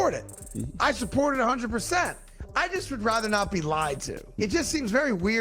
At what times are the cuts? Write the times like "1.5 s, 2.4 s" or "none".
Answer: 4.4 s